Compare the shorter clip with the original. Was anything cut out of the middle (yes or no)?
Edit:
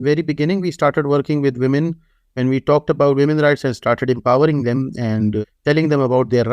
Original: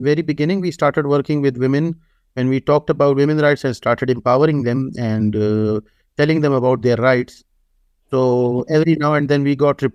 yes